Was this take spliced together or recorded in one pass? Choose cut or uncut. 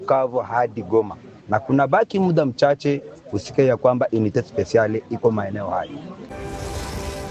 cut